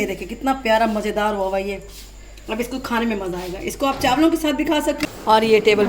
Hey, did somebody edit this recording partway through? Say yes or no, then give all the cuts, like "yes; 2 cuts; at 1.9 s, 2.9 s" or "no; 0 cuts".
yes; 1 cut; at 5.0 s